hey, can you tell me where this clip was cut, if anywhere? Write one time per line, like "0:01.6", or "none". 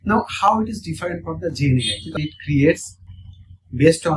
0:02.1